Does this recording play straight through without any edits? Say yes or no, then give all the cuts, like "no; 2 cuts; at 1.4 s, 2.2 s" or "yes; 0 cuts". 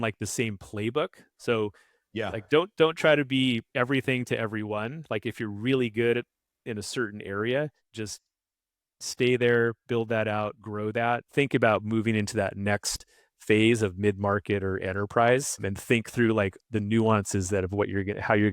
yes; 0 cuts